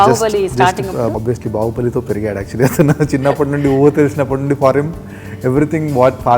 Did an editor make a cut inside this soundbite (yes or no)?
yes